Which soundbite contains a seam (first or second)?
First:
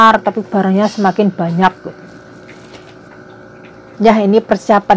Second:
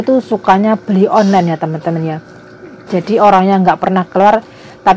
first